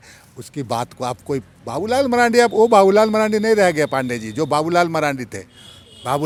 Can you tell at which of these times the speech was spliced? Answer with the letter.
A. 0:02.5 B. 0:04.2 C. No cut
C